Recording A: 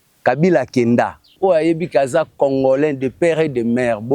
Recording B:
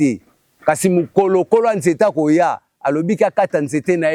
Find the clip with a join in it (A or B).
A